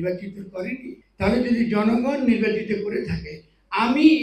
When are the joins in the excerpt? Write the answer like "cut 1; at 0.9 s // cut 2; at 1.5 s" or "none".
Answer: cut 1; at 1.0 s